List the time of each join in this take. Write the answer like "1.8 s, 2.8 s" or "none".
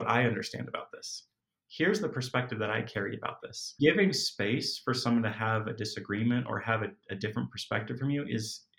3.8 s